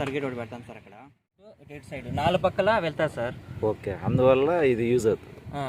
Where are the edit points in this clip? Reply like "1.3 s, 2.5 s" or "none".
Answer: 1.6 s

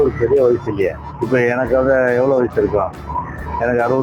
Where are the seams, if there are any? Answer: 1.1 s

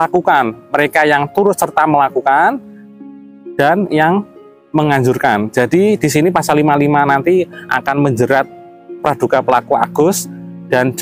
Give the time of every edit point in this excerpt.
none

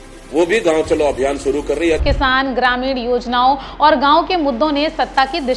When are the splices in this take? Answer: 2.0 s

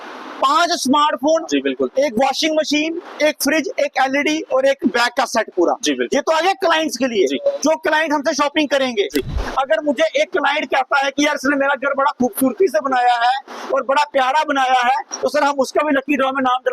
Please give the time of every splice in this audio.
9.4 s

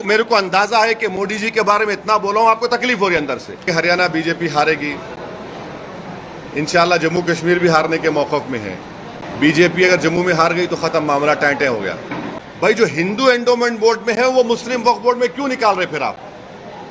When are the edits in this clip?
3.7 s, 9.2 s, 12.3 s

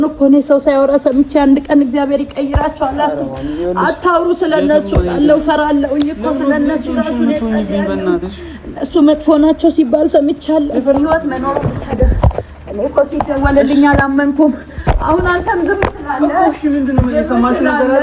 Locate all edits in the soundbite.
10.9 s

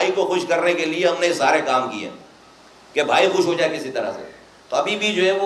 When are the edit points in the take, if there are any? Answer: none

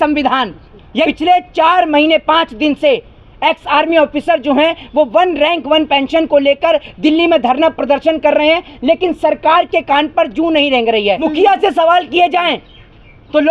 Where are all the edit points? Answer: 1.1 s, 11.3 s

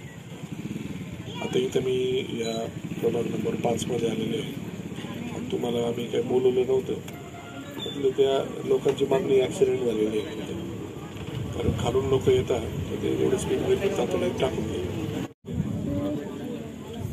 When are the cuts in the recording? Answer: 15.3 s

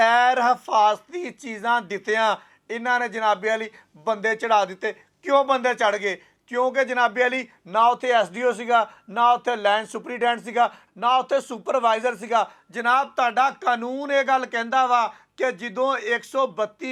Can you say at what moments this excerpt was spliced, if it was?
none

